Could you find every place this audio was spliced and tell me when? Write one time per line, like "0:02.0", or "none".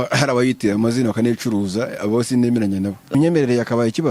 0:03.0